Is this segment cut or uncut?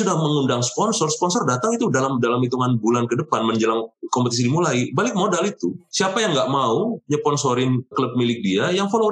uncut